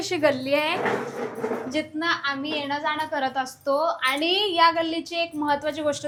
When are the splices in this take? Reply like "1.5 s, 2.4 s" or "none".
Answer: none